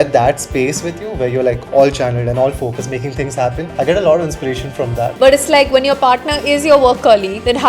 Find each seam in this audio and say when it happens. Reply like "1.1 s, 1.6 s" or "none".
5.1 s